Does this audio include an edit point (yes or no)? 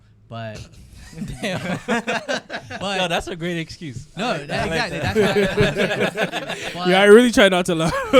no